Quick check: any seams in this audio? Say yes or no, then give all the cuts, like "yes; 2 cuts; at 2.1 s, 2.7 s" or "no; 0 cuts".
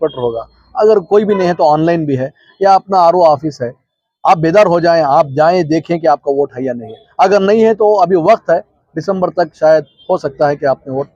no; 0 cuts